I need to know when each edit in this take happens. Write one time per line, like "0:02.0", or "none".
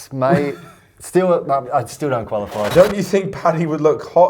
0:02.7